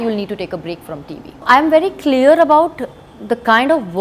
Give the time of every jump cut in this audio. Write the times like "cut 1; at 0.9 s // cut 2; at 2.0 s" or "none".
cut 1; at 1.4 s // cut 2; at 3.1 s